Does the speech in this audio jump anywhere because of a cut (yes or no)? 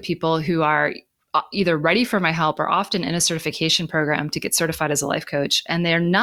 no